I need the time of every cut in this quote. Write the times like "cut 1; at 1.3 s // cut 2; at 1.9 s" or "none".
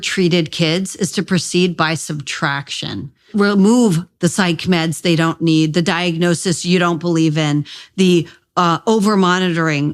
cut 1; at 3.3 s